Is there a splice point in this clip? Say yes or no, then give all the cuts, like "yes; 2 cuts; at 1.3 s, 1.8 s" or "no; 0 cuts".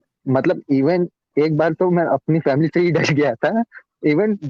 no; 0 cuts